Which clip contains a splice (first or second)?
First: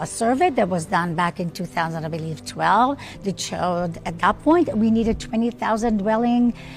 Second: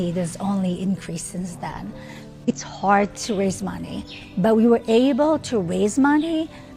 second